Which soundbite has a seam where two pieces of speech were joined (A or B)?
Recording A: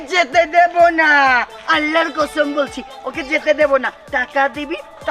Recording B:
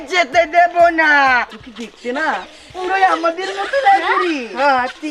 B